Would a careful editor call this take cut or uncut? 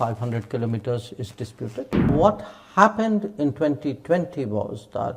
cut